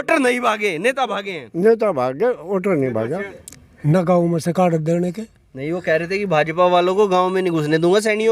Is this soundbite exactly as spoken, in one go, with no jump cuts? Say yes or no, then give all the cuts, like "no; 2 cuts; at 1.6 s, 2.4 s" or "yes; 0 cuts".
no; 1 cut; at 3.3 s